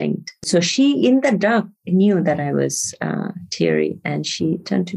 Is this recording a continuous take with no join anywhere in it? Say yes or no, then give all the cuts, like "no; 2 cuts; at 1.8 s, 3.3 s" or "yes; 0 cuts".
yes; 0 cuts